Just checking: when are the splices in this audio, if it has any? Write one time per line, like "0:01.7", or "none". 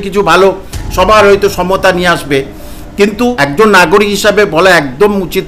0:03.5

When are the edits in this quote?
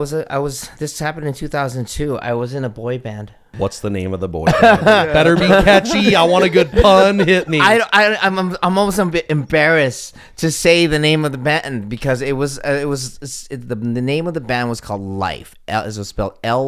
0:03.5

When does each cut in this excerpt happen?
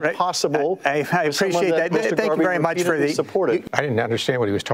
0:03.6

